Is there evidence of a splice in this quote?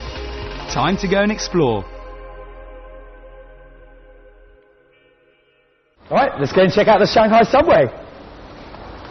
yes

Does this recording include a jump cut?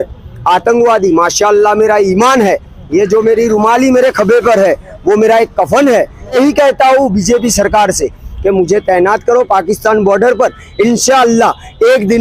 yes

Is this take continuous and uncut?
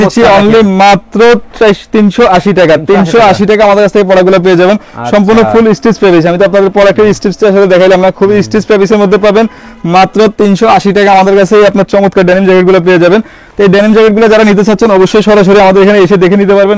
yes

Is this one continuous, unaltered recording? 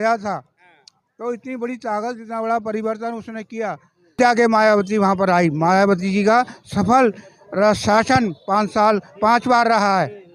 no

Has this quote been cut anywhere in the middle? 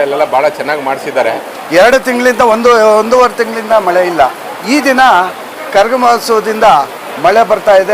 yes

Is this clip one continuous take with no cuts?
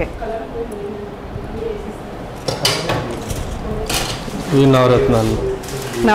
yes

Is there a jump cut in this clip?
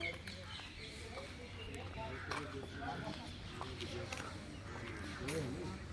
no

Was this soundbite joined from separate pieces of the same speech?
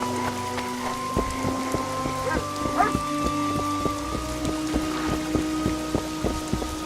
no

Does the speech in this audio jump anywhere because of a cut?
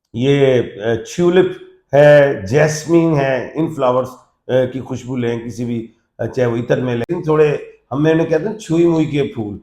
yes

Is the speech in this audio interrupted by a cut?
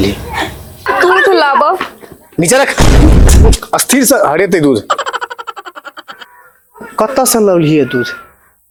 no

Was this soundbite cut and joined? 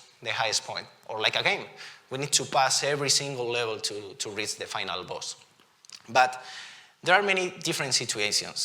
no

